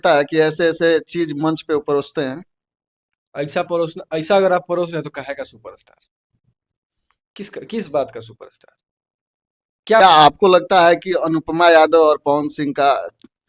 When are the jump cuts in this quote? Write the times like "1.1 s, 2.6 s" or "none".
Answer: 10.0 s